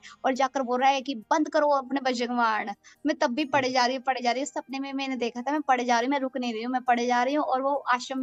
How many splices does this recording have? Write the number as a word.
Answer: zero